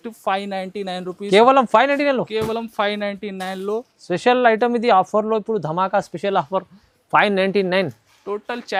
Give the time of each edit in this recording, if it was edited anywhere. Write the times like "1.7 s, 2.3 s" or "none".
none